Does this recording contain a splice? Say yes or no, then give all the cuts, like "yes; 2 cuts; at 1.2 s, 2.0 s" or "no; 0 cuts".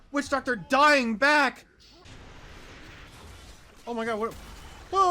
yes; 1 cut; at 2.3 s